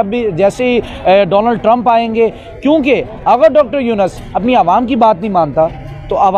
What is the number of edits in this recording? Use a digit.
0